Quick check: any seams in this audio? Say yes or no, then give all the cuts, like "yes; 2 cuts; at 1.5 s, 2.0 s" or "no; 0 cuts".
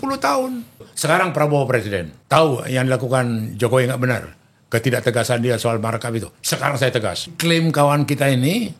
yes; 3 cuts; at 0.9 s, 2.1 s, 7.4 s